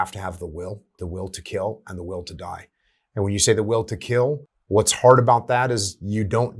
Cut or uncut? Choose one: cut